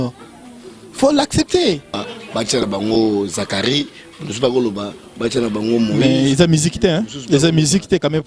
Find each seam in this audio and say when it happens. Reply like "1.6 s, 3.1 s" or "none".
2.0 s